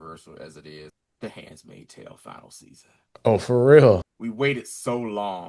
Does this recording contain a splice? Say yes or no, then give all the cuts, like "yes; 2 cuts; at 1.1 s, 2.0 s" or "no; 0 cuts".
yes; 2 cuts; at 0.9 s, 4.1 s